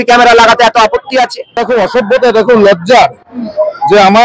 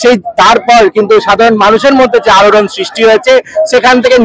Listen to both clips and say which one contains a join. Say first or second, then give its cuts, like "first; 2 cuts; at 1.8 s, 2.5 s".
first; 1 cut; at 1.6 s